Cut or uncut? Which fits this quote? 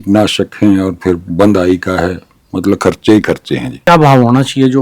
cut